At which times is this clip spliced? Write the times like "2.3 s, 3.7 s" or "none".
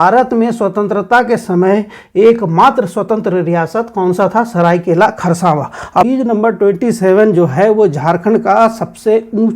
6.0 s